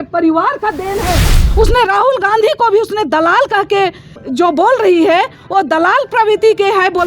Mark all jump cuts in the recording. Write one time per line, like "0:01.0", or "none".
0:01.4
0:04.1